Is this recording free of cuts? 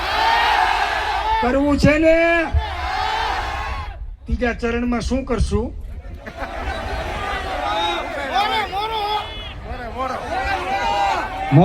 no; 1 cut; at 3.6 s

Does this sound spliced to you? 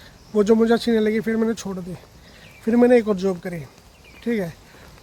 no; 0 cuts

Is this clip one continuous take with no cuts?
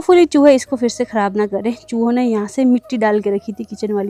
yes; 0 cuts

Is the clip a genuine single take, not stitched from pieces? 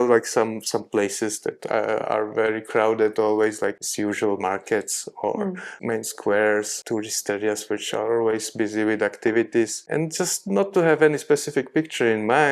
no; 4 cuts; at 3.8 s, 5.7 s, 6.8 s, 9.8 s

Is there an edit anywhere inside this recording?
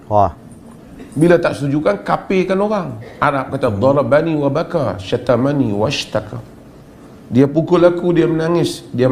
yes; 1 cut; at 3.0 s

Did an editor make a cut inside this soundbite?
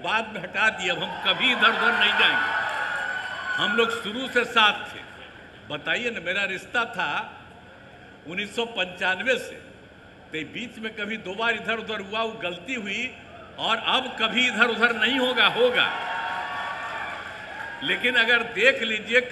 no; 0 cuts

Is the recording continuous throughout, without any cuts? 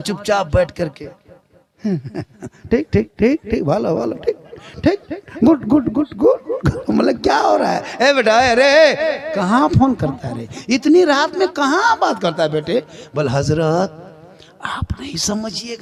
yes; 0 cuts

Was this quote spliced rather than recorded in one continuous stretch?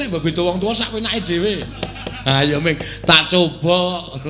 no; 0 cuts

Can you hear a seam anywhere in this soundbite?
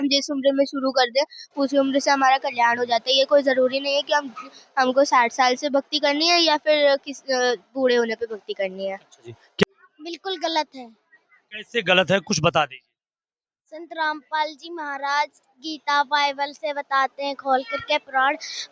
yes; 1 cut; at 9.6 s

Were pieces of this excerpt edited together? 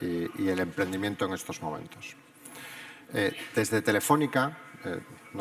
no; 0 cuts

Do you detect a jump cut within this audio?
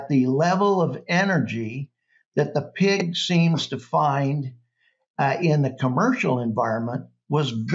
no; 0 cuts

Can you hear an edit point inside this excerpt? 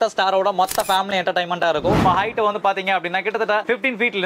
yes; 1 cut; at 2.0 s

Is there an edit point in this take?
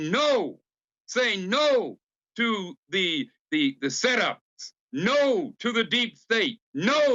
no; 0 cuts

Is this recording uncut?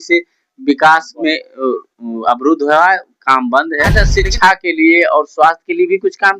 no; 1 cut; at 3.9 s

